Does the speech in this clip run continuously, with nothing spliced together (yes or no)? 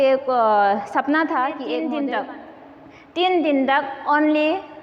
no